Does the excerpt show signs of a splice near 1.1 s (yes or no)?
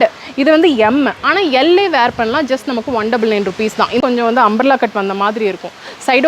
no